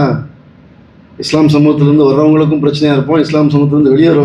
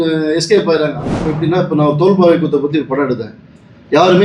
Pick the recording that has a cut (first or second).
second